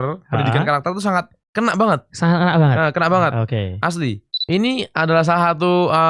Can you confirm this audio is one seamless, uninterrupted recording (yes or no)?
no